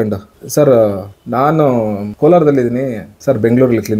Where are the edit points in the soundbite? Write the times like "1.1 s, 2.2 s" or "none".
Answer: none